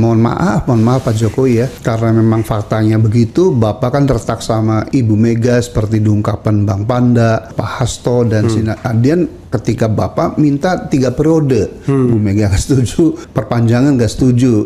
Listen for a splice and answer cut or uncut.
cut